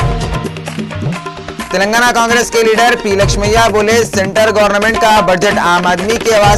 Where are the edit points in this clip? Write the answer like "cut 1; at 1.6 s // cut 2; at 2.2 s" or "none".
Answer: cut 1; at 1.5 s

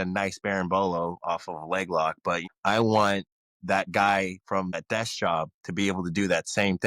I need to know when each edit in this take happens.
cut 1; at 2.4 s // cut 2; at 4.8 s

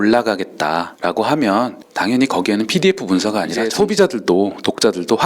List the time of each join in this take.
cut 1; at 0.9 s // cut 2; at 1.8 s // cut 3; at 3.6 s

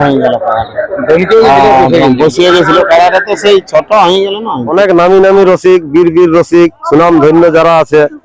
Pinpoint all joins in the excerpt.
cut 1; at 4.7 s

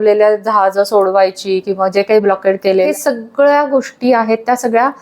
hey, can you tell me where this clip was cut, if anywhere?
cut 1; at 2.9 s

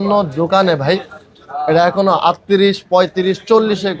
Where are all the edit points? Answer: none

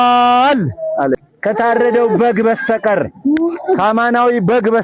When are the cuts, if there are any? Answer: cut 1; at 1.2 s

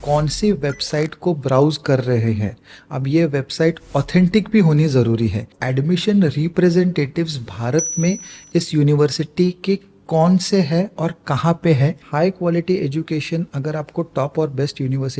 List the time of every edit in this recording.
cut 1; at 5.6 s // cut 2; at 12.0 s

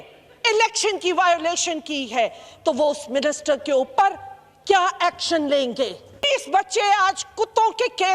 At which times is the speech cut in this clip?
cut 1; at 6.3 s

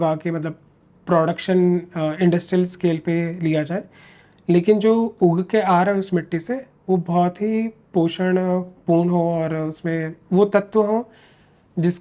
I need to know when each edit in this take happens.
none

